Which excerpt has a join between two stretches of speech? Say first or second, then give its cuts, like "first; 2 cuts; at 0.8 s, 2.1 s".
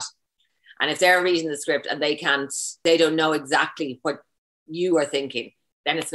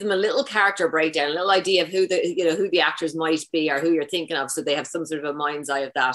first; 1 cut; at 2.8 s